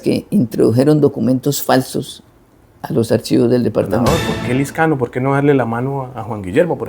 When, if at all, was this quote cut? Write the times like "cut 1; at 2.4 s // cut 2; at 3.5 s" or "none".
cut 1; at 4.1 s